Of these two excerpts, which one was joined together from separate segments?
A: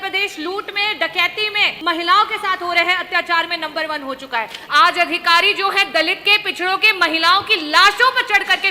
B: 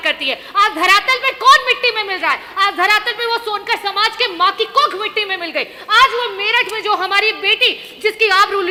A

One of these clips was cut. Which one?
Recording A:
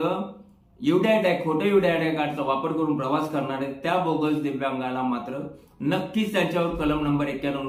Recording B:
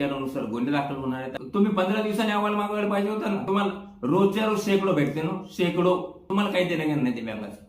B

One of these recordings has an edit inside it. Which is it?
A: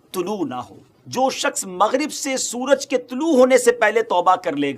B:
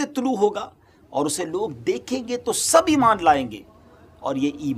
A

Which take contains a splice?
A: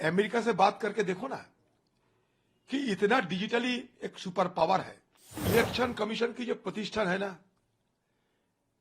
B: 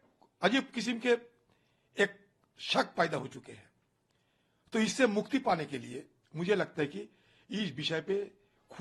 A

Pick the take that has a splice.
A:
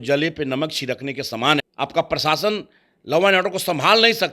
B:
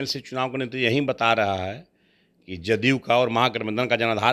A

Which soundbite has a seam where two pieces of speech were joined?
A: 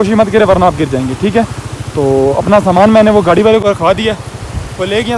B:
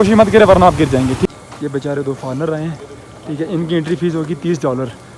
B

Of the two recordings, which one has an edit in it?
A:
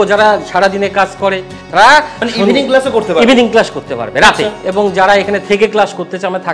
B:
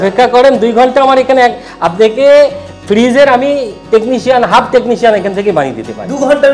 A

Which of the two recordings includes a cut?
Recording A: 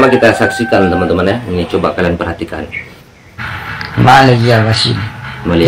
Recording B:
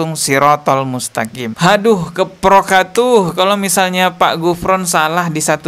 B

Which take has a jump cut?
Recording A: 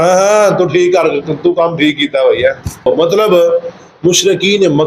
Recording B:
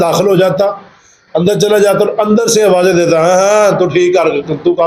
A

